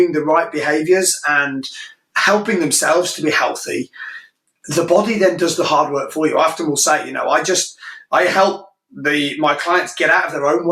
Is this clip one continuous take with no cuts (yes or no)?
yes